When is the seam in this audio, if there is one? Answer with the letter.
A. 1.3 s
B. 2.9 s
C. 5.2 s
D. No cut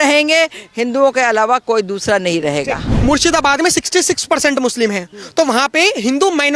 B